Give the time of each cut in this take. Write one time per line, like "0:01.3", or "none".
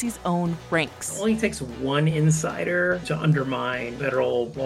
0:03.0